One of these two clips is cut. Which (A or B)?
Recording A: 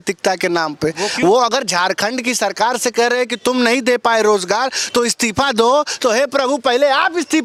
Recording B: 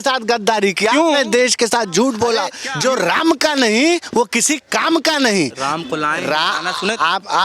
B